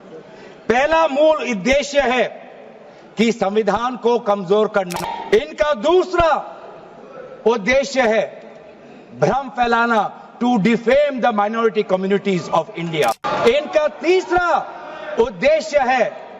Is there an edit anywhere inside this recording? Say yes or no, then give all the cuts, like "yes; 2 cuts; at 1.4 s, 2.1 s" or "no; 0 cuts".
yes; 2 cuts; at 5.0 s, 13.2 s